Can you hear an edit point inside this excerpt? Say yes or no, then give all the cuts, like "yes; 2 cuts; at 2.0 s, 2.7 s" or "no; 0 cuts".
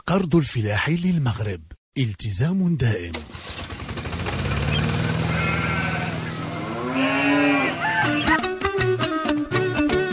yes; 1 cut; at 3.1 s